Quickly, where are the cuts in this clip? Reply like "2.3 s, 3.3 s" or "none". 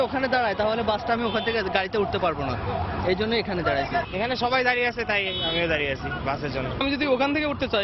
none

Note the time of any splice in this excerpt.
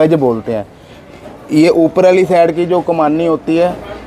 none

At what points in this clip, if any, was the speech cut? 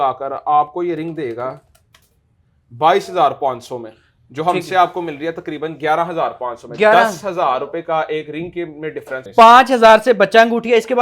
9.2 s

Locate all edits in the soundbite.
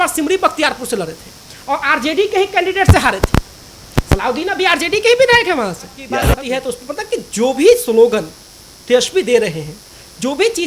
6.3 s

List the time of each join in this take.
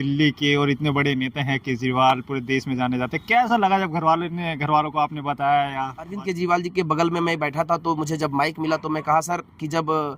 6.2 s

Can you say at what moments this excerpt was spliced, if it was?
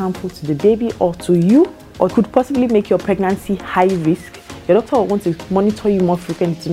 2.1 s, 5.4 s

